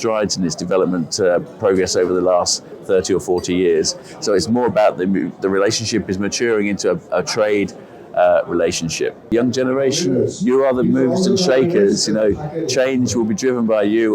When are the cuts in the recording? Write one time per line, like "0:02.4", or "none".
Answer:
0:09.3